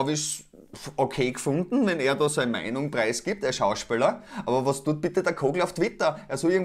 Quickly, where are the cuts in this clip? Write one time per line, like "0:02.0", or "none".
none